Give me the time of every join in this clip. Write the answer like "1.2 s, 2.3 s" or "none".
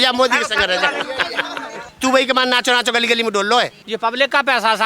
1.9 s, 3.8 s

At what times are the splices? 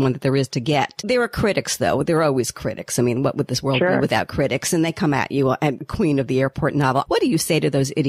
1.0 s, 5.8 s, 7.1 s

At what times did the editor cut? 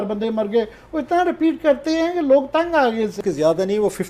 3.2 s

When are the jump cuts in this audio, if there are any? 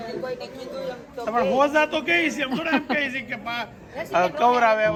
none

